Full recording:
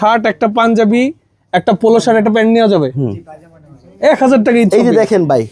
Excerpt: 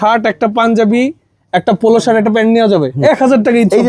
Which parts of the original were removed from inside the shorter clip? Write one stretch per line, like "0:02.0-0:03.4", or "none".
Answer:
0:02.9-0:03.9